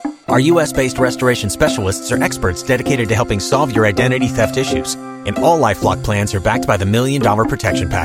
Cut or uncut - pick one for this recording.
uncut